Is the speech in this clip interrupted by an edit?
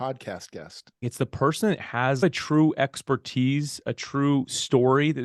yes; 2 cuts; at 1.1 s, 2.2 s

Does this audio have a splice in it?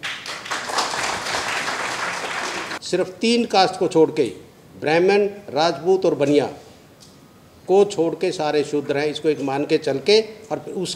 yes; 1 cut; at 2.7 s

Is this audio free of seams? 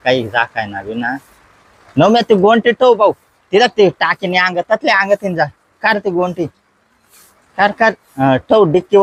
yes; 0 cuts

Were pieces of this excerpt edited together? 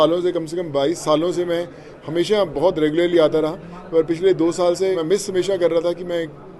yes; 1 cut; at 4.9 s

